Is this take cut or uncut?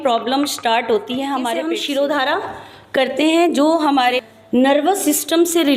cut